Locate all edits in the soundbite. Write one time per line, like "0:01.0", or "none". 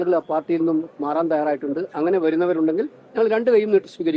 none